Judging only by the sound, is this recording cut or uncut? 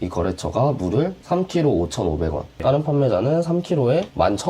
cut